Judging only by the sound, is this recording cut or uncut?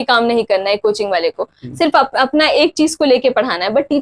uncut